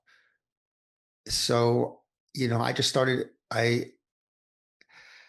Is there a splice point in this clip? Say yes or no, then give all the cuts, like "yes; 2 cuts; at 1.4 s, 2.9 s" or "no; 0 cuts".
no; 0 cuts